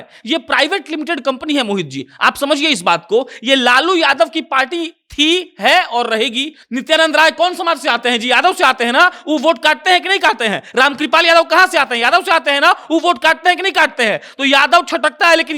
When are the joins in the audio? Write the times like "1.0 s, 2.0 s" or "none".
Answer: 6.5 s